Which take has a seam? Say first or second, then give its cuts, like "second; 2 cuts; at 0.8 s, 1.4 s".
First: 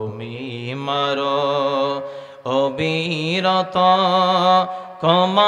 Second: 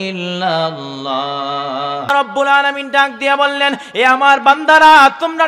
second; 1 cut; at 2.1 s